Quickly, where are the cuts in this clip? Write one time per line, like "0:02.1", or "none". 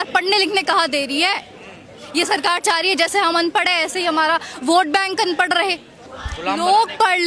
none